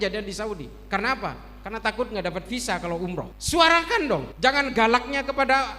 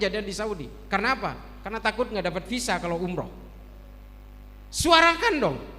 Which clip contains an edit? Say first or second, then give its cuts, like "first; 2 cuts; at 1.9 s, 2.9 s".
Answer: first; 2 cuts; at 3.4 s, 4.3 s